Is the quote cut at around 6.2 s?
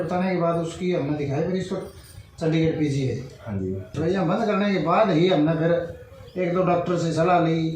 no; 1 cut; at 3.8 s

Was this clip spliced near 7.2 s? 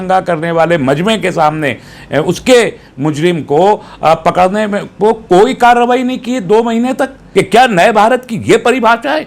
yes; 1 cut; at 7.2 s

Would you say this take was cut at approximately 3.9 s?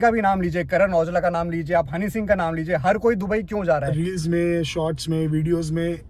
yes; 1 cut; at 3.9 s

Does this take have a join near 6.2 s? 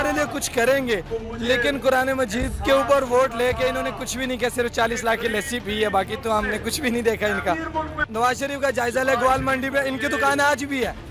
no; 1 cut; at 8.0 s

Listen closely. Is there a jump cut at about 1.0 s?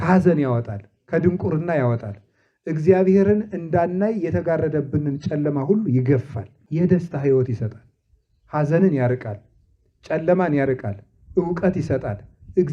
no; 1 cut; at 6.6 s

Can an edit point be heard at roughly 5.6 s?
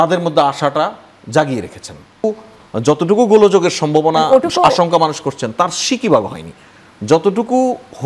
no; 1 cut; at 2.2 s

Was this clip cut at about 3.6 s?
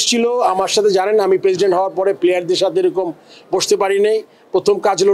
no; 0 cuts

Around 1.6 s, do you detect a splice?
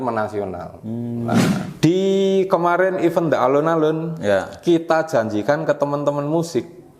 yes; 1 cut; at 1.6 s

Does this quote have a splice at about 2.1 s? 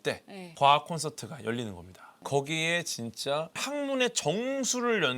yes; 2 cuts; at 2.1 s, 3.6 s

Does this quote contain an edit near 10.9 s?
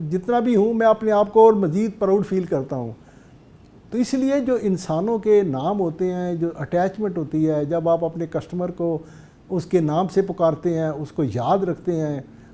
no; 0 cuts

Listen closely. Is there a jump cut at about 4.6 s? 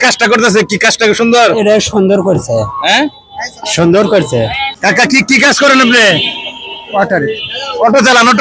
yes; 1 cut; at 4.6 s

